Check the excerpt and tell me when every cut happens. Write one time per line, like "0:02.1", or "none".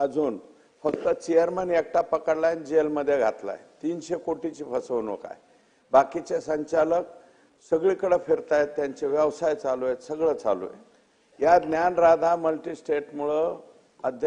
none